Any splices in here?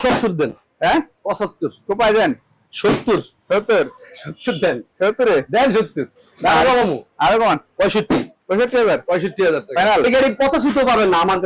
yes; 1 cut; at 10.0 s

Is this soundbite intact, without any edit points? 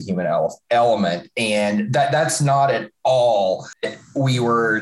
no; 1 cut; at 3.8 s

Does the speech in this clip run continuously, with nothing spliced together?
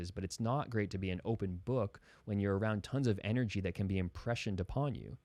yes; 0 cuts

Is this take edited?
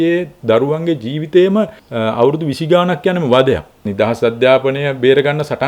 yes; 2 cuts; at 1.8 s, 3.9 s

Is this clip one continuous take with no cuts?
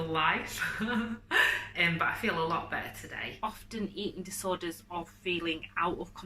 no; 1 cut; at 3.3 s

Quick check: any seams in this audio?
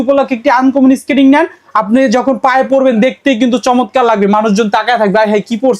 no; 0 cuts

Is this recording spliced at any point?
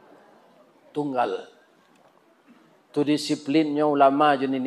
no; 0 cuts

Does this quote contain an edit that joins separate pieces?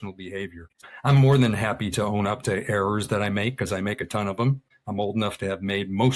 yes; 2 cuts; at 0.9 s, 4.7 s

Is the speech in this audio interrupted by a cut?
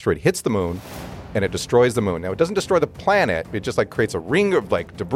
no; 0 cuts

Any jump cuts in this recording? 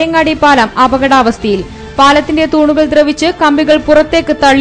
no; 0 cuts

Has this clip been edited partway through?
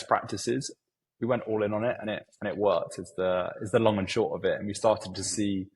no; 0 cuts

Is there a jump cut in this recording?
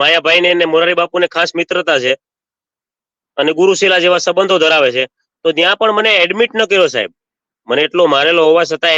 no; 0 cuts

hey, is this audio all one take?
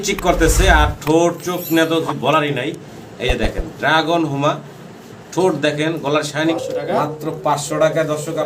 no; 1 cut; at 6.5 s

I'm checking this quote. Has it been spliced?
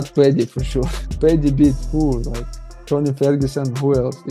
yes; 1 cut; at 1.0 s

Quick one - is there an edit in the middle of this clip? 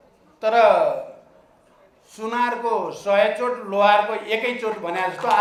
no; 0 cuts

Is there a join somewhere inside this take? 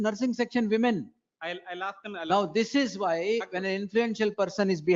no; 0 cuts

